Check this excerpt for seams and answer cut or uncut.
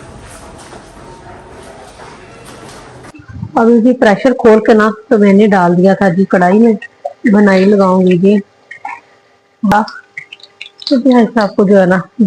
cut